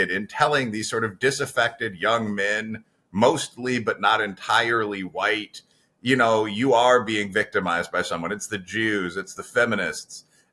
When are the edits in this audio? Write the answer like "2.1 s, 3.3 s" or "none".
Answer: none